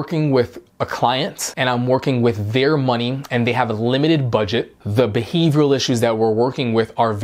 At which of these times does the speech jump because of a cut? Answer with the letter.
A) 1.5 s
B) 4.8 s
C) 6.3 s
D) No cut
B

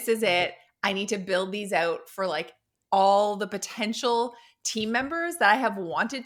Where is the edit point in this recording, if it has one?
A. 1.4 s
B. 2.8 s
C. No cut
C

